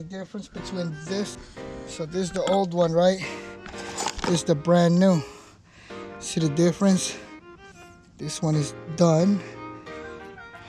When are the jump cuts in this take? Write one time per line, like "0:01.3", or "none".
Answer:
0:01.4